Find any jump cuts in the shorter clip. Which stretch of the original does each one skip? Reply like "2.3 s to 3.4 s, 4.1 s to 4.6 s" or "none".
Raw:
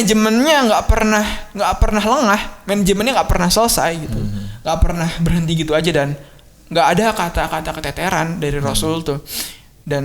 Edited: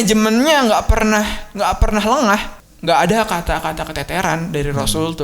2.5 s to 6.4 s